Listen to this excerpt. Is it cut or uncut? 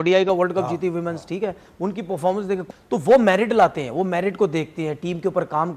cut